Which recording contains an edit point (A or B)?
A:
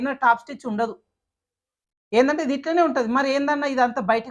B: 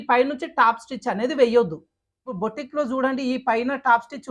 B